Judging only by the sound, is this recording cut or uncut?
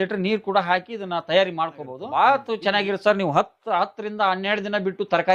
cut